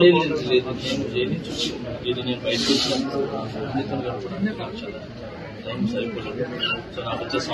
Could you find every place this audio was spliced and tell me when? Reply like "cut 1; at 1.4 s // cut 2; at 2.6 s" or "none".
none